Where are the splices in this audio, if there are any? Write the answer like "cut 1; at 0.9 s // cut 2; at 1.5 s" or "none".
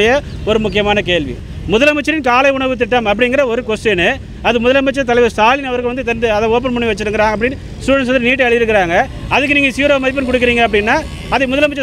cut 1; at 1.4 s